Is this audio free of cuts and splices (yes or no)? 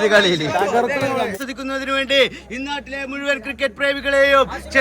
no